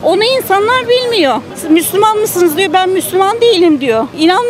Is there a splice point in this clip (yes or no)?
yes